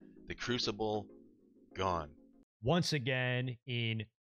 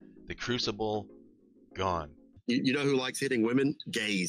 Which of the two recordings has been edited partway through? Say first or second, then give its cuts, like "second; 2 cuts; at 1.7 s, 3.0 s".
second; 1 cut; at 2.4 s